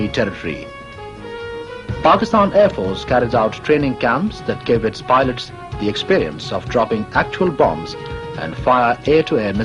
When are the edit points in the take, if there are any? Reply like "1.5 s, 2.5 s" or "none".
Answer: 8.5 s